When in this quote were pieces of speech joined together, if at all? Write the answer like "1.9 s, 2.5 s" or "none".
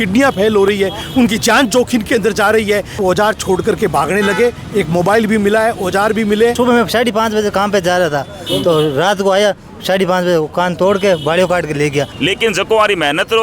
3.0 s, 6.5 s, 12.1 s